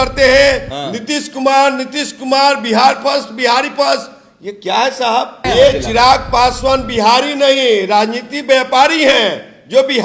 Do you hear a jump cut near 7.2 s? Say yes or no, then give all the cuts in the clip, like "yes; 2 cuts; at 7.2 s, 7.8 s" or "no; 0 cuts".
no; 1 cut; at 5.4 s